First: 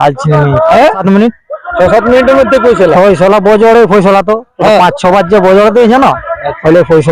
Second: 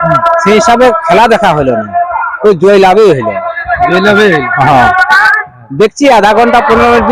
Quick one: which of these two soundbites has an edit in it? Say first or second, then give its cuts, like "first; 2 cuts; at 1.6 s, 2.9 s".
first; 1 cut; at 1.0 s